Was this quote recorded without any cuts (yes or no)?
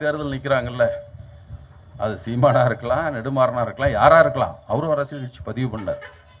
yes